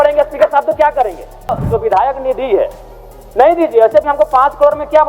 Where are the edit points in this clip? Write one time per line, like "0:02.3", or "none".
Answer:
0:01.5